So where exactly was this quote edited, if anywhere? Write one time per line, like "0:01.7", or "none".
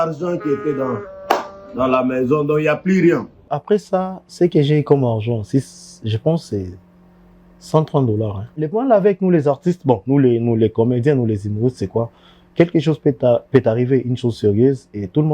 0:03.5
0:08.6

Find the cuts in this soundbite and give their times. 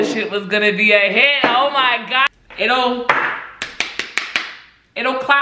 0:02.3

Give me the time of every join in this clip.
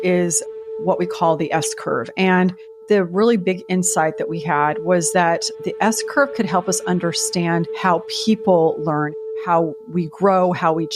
none

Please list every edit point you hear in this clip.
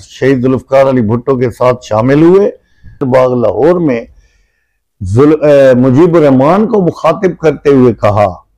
0:03.1

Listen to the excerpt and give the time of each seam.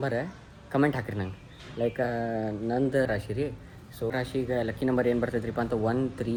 none

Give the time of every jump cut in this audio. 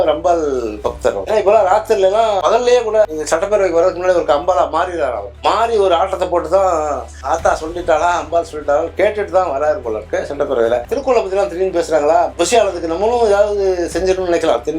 0:01.2
0:10.8
0:12.3

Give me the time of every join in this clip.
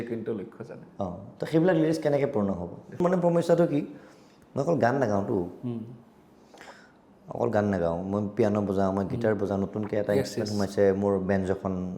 0:03.0

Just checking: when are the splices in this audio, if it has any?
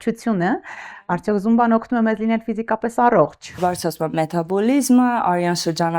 0:03.6

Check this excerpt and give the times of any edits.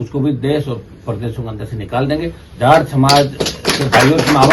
0:02.4

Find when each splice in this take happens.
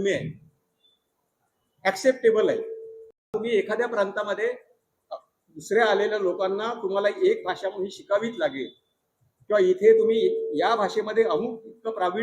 0:03.3

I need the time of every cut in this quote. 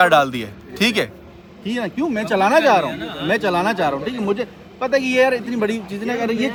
none

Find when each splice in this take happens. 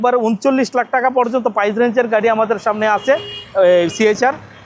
none

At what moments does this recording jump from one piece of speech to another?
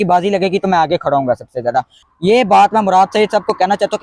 0:02.0

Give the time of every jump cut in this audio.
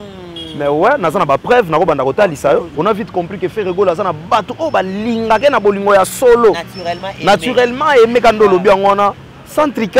0:02.7

